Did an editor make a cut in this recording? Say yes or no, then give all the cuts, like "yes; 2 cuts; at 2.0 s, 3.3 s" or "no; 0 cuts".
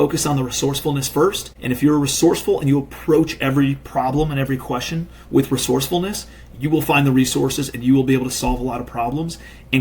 yes; 1 cut; at 1.5 s